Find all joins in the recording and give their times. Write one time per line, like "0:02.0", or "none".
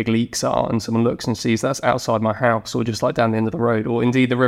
none